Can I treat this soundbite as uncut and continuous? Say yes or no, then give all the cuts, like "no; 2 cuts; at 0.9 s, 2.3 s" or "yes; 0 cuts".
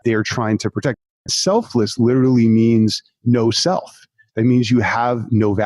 no; 1 cut; at 1.0 s